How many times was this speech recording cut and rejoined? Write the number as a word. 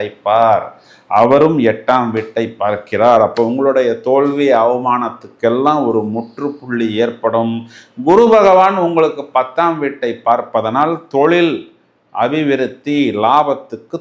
zero